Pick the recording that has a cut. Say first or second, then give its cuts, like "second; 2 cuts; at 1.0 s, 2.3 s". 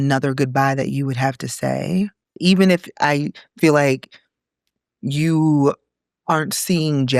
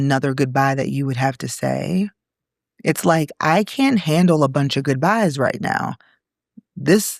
first; 1 cut; at 2.3 s